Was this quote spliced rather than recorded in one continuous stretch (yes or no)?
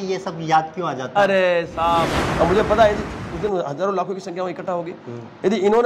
yes